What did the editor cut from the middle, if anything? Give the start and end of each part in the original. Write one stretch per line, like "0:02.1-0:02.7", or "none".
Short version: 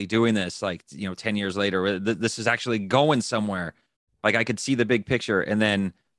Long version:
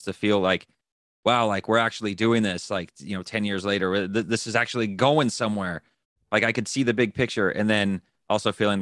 none

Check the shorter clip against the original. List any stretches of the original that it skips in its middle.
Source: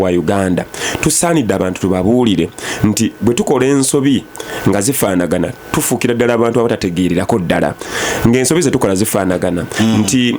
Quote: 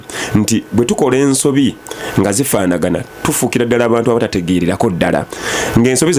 none

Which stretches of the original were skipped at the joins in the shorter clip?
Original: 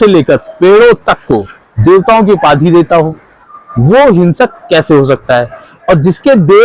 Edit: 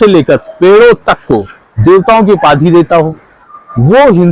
none

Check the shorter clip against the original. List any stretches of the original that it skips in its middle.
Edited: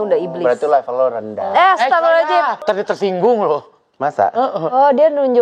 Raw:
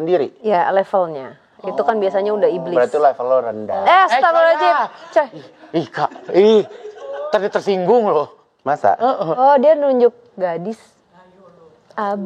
0:04.9-0:07.2

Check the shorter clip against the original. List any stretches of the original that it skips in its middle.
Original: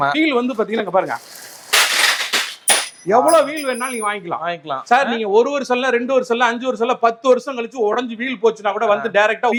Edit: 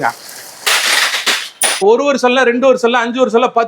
0:02.9-0:05.3

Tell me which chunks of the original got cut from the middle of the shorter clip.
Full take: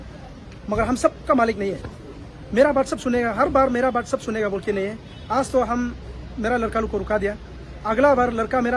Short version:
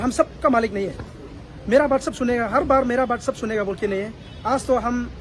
none

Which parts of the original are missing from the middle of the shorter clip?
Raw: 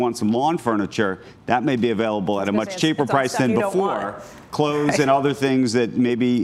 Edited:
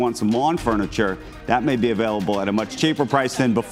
none

